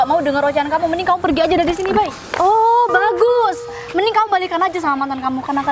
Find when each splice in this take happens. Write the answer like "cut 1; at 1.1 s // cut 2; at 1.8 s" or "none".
cut 1; at 2.3 s